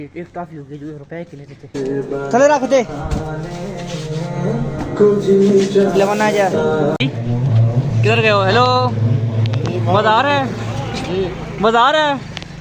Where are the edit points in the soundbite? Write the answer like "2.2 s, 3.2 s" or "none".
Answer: 1.8 s, 7.0 s